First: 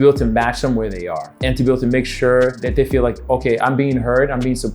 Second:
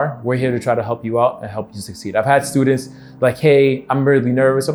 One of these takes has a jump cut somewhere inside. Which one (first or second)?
first